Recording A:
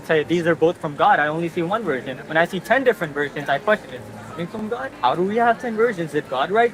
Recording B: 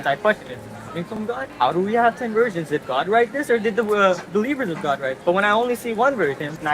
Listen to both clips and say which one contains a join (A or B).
B